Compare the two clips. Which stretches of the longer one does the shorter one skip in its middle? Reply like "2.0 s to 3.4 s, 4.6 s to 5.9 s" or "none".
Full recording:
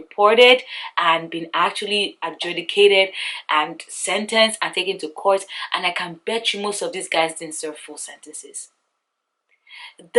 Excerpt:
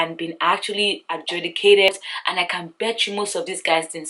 3.0 s to 5.3 s